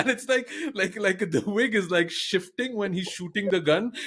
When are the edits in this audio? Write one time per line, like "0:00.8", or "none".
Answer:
none